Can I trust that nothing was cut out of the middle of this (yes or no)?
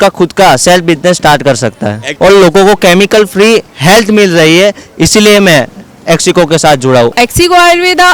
no